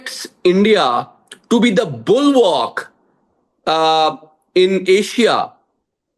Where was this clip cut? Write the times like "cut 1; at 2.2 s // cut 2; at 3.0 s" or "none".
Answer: none